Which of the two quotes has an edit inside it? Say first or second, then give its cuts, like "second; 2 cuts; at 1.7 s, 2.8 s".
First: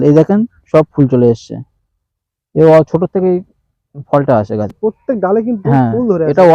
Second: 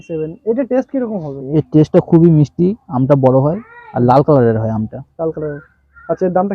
first; 1 cut; at 4.7 s